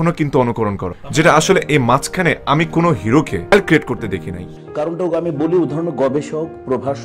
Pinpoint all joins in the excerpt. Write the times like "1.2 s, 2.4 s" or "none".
1.0 s, 4.4 s

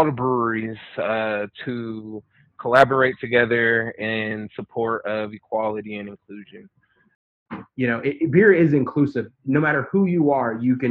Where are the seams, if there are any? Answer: 7.2 s

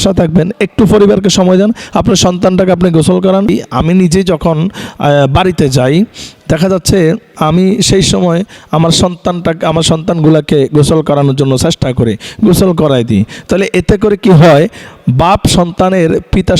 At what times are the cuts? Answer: 3.5 s

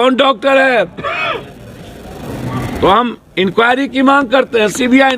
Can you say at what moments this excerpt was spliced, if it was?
2.8 s

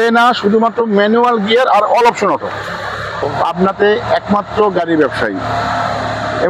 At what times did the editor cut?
3.3 s

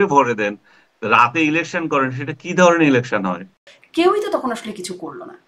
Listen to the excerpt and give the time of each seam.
3.6 s

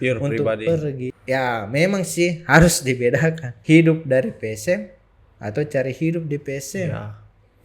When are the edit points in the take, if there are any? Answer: 1.0 s, 3.5 s

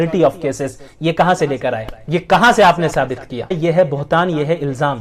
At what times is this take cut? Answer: 1.9 s, 3.6 s

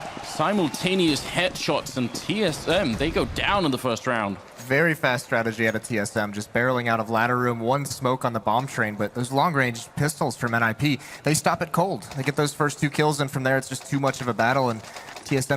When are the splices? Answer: 8.2 s

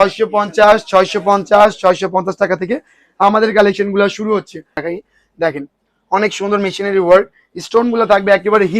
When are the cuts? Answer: 4.8 s

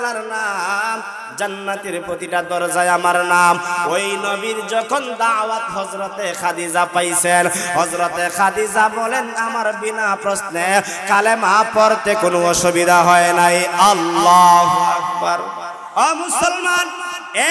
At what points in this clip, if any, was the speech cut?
15.9 s

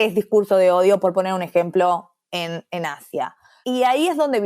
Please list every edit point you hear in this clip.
3.3 s

